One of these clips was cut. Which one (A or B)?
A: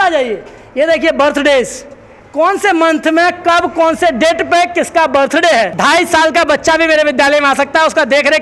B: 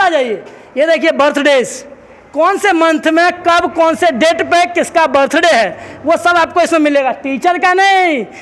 A